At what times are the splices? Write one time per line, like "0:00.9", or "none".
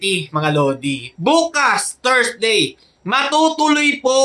0:01.0